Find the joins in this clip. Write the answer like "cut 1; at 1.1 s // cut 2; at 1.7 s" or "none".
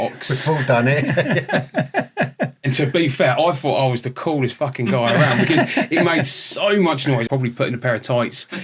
cut 1; at 2.7 s // cut 2; at 7.2 s